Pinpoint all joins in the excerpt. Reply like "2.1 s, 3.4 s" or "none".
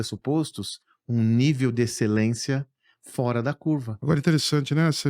3.9 s